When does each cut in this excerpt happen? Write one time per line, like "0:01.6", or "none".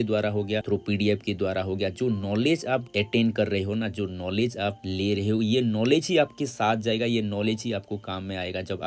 none